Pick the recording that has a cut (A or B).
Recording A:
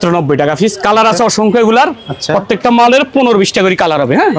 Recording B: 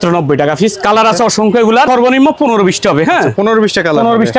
B